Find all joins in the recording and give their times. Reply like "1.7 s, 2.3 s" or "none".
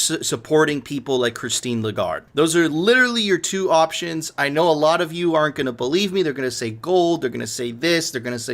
2.3 s